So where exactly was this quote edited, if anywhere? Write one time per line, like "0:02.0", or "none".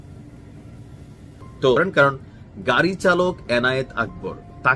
0:01.8